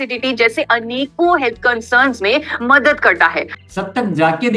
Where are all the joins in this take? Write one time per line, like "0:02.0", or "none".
0:03.6